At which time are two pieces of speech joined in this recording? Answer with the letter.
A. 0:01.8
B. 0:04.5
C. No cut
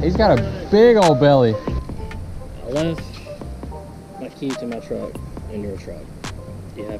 A